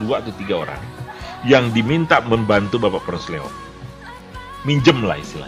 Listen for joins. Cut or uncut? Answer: uncut